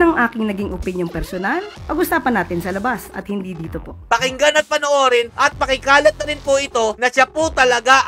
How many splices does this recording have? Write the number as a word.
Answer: one